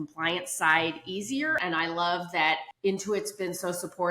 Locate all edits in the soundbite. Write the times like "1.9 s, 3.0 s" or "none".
1.6 s, 2.7 s